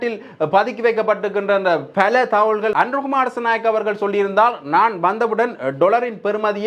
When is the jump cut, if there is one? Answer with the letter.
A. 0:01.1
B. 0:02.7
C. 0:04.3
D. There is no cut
B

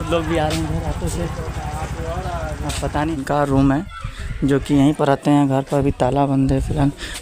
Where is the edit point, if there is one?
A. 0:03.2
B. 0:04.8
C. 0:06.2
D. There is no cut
A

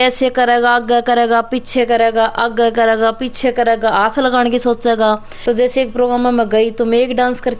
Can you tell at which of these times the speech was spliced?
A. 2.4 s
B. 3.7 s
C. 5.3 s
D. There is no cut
C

